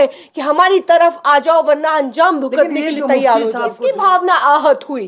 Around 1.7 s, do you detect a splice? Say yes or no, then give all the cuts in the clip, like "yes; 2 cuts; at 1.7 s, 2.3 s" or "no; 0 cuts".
no; 1 cut; at 3.7 s